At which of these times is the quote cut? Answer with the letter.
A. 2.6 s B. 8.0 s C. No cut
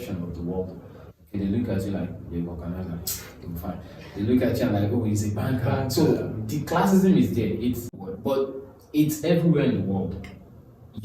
B